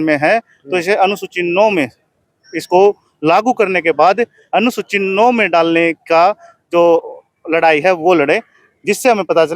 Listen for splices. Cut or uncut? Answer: uncut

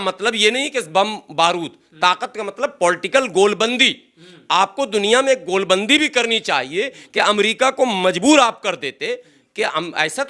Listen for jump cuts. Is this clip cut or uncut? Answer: uncut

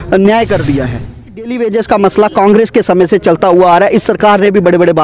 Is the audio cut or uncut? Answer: cut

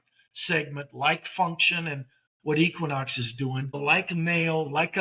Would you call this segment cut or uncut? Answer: cut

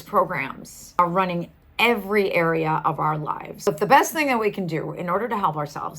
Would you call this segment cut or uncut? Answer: cut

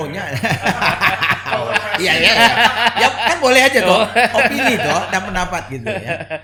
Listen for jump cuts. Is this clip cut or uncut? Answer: uncut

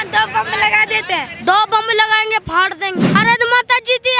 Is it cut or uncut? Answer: cut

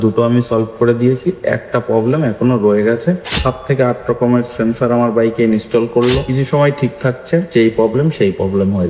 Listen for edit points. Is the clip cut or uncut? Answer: cut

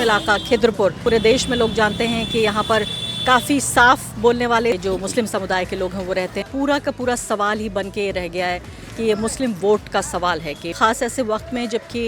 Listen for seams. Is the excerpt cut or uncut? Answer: cut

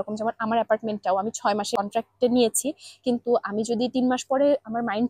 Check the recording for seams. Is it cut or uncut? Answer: cut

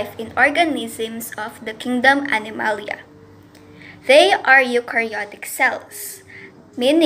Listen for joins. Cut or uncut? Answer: uncut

